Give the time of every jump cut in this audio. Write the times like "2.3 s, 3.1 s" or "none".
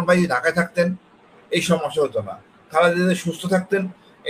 none